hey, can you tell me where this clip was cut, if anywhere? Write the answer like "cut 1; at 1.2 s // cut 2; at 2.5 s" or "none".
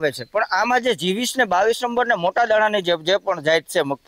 none

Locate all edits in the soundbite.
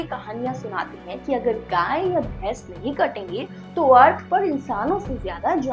none

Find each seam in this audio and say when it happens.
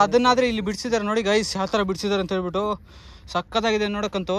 none

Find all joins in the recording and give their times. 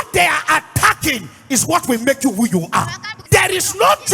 cut 1; at 3.1 s

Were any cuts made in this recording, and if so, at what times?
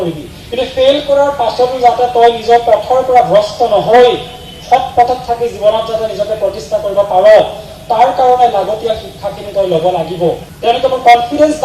cut 1; at 10.5 s

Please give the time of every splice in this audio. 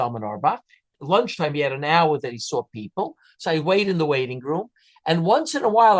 cut 1; at 1.0 s

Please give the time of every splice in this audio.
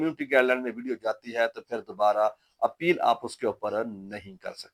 none

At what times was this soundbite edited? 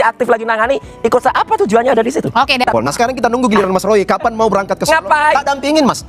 cut 1; at 2.7 s

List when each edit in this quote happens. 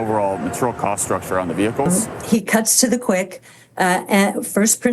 cut 1; at 1.9 s

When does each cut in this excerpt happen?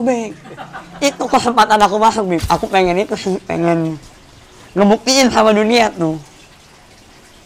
cut 1; at 2.4 s

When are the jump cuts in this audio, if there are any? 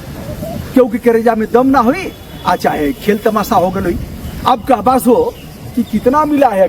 none

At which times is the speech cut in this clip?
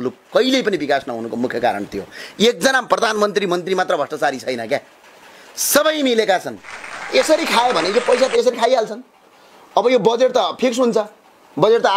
cut 1; at 7.1 s

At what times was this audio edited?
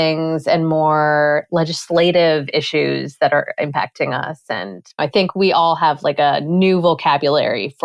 cut 1; at 5.0 s

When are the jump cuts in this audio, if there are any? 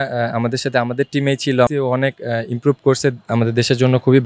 cut 1; at 1.7 s

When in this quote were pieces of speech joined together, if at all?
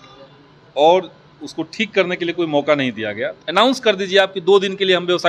cut 1; at 3.4 s

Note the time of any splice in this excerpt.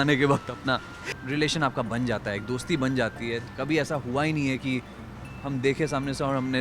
cut 1; at 0.9 s // cut 2; at 3.4 s

